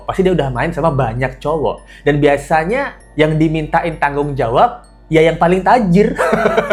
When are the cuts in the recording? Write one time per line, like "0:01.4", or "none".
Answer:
none

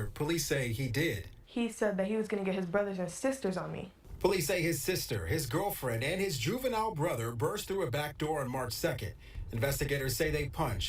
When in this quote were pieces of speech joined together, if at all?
0:04.6
0:06.2

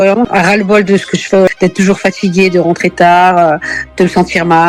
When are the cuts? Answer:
0:01.5

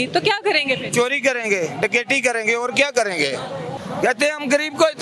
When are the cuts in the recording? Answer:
0:03.8

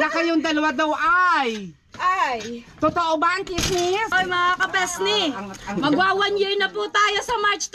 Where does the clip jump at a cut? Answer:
0:04.1

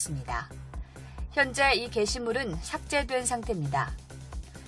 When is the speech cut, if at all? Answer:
0:03.5

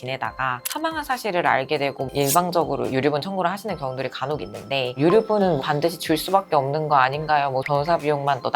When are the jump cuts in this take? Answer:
0:02.1
0:04.9
0:07.7

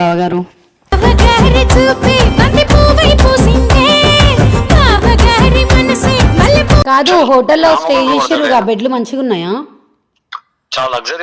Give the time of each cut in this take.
0:06.9

